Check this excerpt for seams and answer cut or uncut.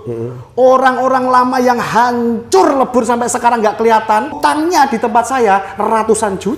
cut